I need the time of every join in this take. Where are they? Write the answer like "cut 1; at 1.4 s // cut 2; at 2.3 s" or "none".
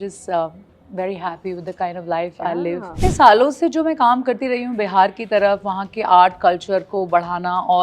cut 1; at 3.0 s